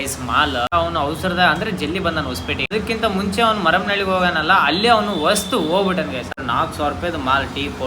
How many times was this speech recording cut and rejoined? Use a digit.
3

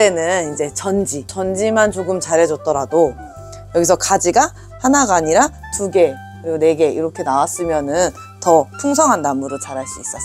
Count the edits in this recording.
0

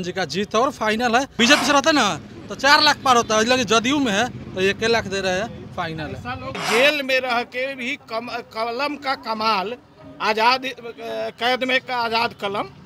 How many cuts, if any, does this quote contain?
2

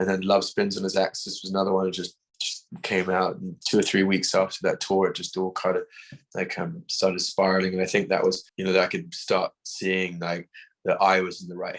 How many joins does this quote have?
2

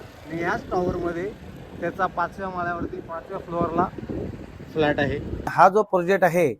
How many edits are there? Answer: 1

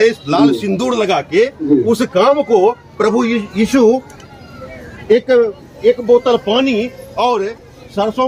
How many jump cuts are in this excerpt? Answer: 0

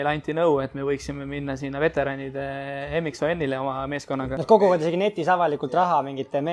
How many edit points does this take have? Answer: 1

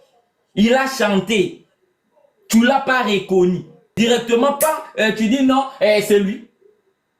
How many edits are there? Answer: 1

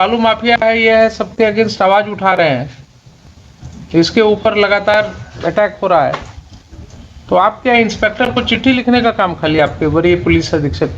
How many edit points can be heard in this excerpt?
0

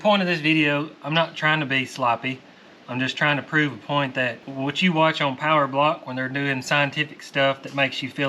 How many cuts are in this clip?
1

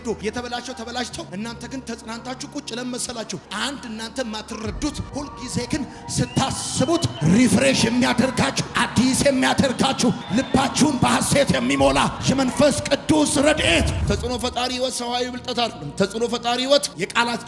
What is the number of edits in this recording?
1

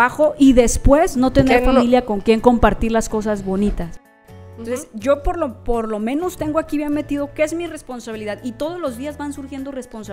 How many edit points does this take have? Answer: 1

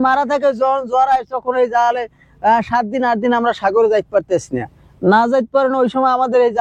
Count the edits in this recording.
0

